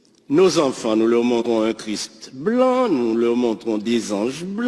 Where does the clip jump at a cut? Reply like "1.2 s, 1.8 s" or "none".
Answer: 1.4 s